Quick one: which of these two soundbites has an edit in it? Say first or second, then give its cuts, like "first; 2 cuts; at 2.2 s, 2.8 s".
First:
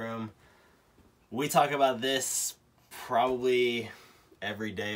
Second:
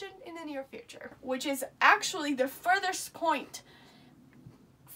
second; 1 cut; at 1.2 s